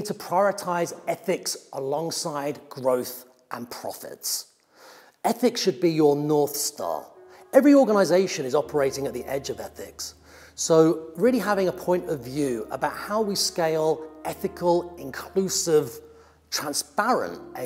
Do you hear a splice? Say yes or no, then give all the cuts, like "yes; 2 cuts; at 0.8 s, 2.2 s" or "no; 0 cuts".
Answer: no; 0 cuts